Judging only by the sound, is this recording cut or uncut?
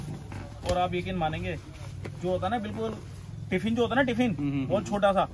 uncut